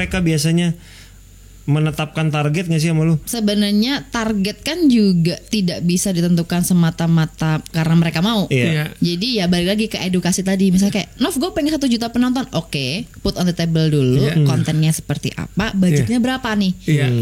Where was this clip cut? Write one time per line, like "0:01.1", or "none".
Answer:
0:03.3